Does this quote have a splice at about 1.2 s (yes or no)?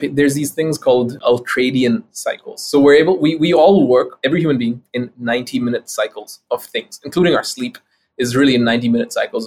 yes